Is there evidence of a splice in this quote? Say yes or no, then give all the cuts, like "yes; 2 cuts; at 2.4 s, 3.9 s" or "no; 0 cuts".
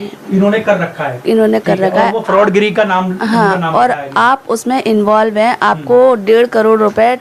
no; 0 cuts